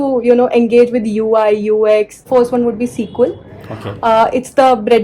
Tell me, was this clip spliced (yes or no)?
yes